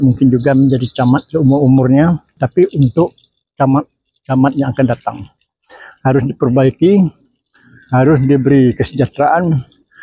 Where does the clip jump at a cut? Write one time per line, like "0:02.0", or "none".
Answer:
0:02.4